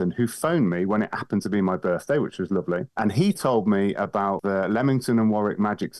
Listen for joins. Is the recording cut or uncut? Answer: cut